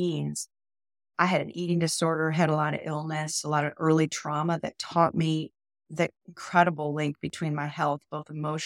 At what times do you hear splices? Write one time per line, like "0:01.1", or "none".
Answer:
0:01.1